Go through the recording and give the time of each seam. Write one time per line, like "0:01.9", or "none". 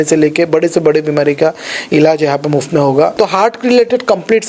0:03.1